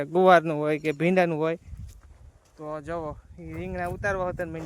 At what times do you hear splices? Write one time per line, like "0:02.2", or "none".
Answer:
none